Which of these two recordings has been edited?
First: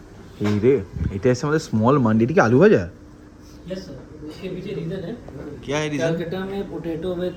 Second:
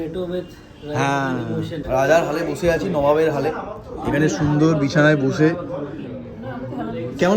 second; 1 cut; at 1.8 s

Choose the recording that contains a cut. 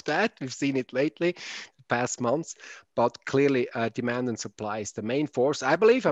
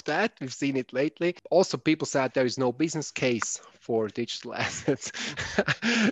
second; 1 cut; at 1.4 s

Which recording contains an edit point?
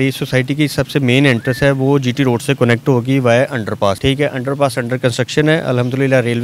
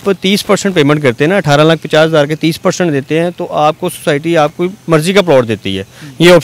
first; 1 cut; at 4.0 s

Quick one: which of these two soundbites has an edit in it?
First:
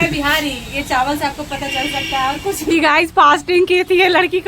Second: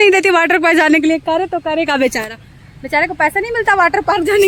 first; 1 cut; at 2.7 s

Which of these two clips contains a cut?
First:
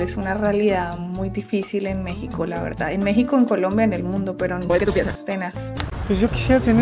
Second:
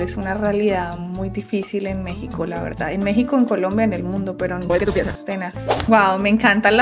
second; 1 cut; at 5.9 s

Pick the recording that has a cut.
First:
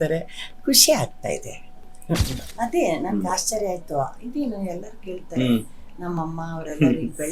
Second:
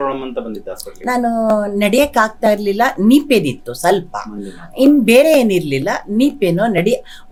first; 1 cut; at 2.4 s

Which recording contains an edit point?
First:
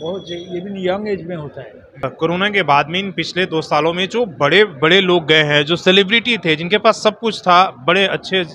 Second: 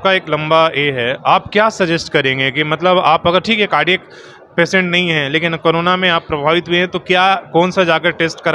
first; 1 cut; at 2.1 s

